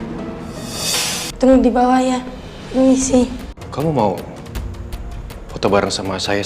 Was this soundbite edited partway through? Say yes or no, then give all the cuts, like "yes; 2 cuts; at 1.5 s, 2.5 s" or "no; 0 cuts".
yes; 1 cut; at 3.6 s